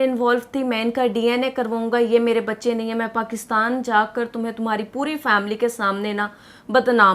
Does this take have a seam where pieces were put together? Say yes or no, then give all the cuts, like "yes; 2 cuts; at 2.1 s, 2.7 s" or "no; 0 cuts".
no; 0 cuts